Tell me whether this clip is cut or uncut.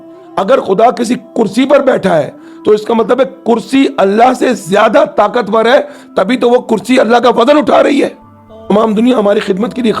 cut